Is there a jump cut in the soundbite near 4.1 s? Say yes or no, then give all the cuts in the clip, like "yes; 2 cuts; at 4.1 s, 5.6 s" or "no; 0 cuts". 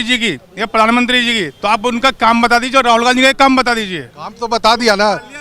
no; 0 cuts